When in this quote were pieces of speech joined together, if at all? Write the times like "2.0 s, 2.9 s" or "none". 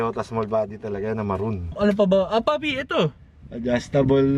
1.7 s